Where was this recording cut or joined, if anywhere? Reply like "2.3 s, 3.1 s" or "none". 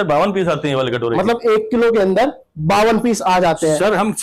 none